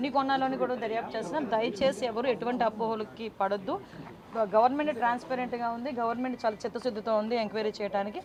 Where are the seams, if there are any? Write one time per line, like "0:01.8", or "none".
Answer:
none